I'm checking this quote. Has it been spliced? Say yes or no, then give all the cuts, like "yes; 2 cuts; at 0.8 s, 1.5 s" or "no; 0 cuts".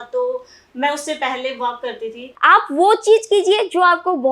yes; 1 cut; at 2.3 s